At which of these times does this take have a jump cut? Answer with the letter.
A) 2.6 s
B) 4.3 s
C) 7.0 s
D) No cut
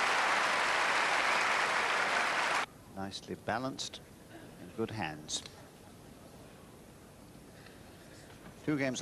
D